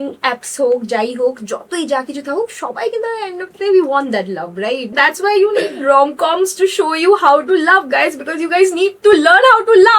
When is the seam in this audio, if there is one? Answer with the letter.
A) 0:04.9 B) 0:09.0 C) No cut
A